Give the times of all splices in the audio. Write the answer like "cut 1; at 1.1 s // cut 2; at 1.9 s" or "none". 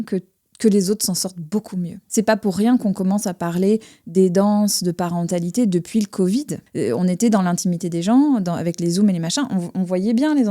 cut 1; at 2.0 s // cut 2; at 6.6 s